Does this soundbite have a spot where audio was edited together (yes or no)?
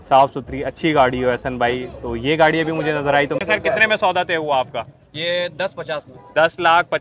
yes